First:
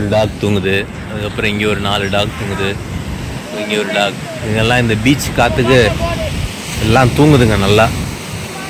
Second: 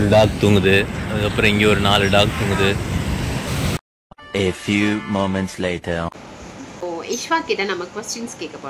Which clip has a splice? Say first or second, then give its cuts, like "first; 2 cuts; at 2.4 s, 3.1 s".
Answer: second; 2 cuts; at 3.5 s, 6.8 s